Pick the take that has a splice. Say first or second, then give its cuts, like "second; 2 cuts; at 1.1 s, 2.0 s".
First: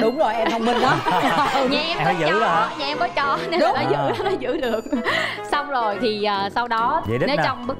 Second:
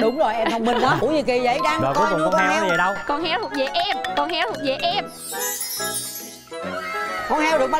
second; 1 cut; at 1.0 s